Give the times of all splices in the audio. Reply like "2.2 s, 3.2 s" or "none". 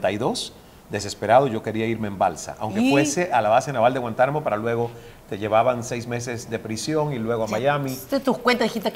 none